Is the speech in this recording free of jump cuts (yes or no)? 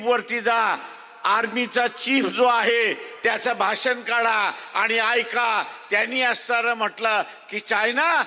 yes